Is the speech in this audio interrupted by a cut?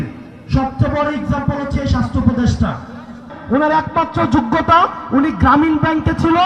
yes; 1 cut; at 3.3 s

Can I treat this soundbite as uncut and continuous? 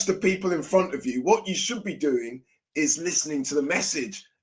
yes; 0 cuts

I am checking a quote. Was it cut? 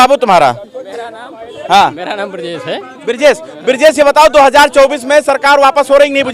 no; 0 cuts

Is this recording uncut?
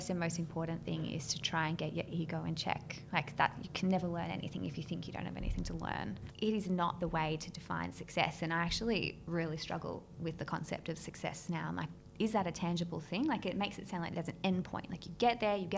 no; 2 cuts; at 6.2 s, 11.9 s

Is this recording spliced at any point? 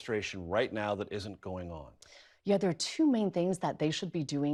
no; 0 cuts

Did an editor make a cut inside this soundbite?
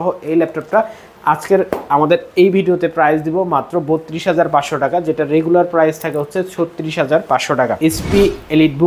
yes; 1 cut; at 7.8 s

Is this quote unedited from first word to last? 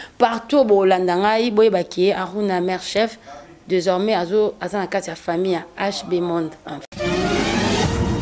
no; 1 cut; at 6.8 s

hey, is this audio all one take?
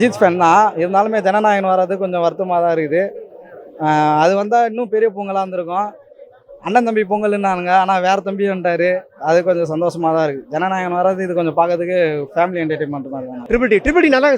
no; 1 cut; at 13.4 s

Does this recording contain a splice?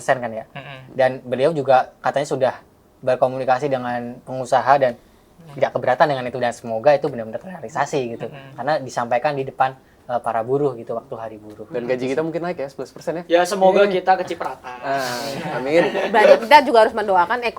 no; 0 cuts

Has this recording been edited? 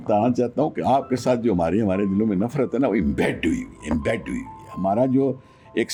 no; 0 cuts

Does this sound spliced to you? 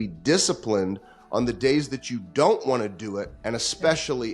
yes; 1 cut; at 3.3 s

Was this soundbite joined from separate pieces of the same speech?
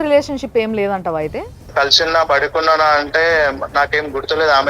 yes; 1 cut; at 1.6 s

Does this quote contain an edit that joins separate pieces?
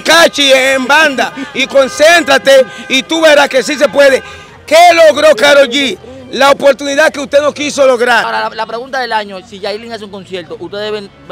yes; 1 cut; at 8.3 s

